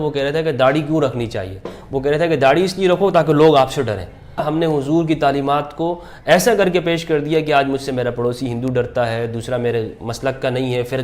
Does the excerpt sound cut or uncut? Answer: cut